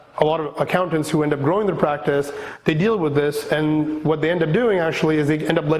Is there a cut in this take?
no; 0 cuts

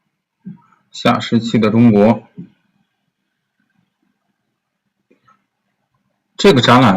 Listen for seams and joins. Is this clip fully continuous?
no; 1 cut; at 4.5 s

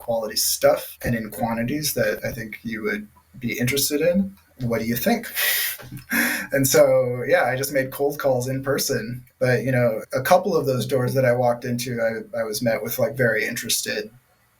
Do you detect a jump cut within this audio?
yes; 1 cut; at 9.2 s

